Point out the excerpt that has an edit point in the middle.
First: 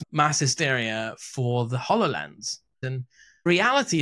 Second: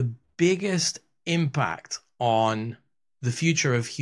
first; 1 cut; at 2.8 s

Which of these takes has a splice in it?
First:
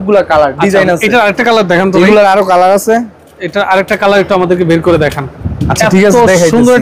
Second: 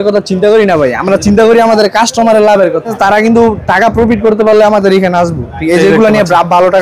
second; 1 cut; at 3.0 s

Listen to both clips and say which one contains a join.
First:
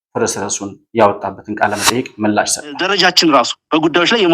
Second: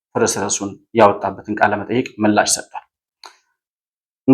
first; 1 cut; at 2.8 s

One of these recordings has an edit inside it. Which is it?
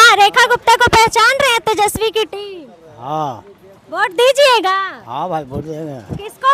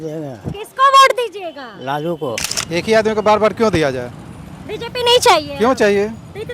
second; 1 cut; at 2.5 s

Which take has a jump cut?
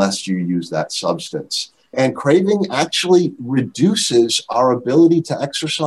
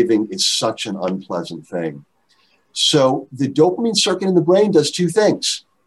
first; 1 cut; at 1.9 s

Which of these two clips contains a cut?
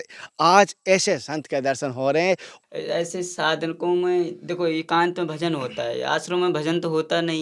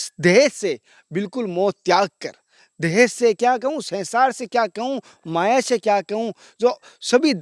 first; 1 cut; at 2.5 s

